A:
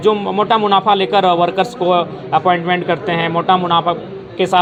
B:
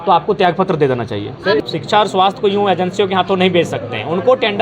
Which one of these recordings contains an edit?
B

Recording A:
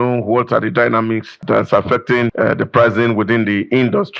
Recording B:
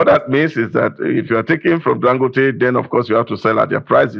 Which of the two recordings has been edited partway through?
A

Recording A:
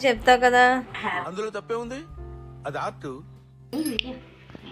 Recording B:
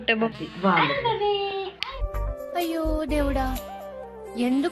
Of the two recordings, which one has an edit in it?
A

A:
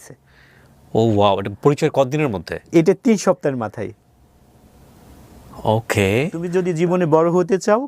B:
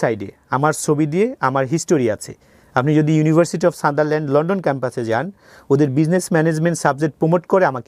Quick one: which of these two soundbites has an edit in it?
A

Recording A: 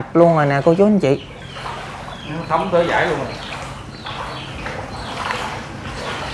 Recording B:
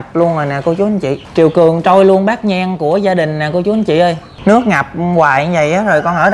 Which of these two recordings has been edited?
B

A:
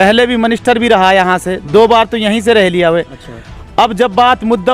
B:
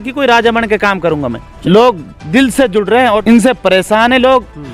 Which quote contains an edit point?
B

